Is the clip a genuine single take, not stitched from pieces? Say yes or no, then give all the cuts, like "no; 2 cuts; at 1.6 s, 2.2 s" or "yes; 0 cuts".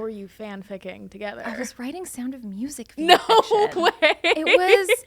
yes; 0 cuts